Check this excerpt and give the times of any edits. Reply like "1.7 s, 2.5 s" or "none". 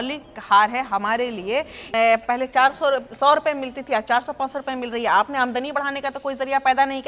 1.8 s